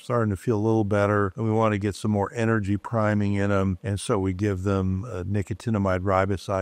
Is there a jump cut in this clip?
no; 0 cuts

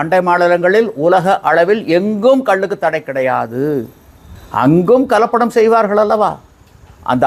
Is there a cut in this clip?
no; 0 cuts

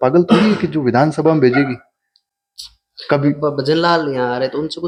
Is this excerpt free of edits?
yes; 0 cuts

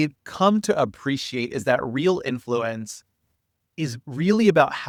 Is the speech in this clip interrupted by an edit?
no; 0 cuts

